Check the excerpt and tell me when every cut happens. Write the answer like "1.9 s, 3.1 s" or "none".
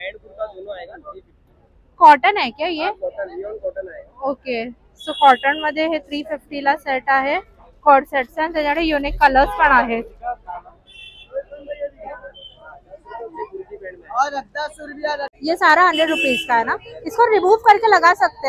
15.3 s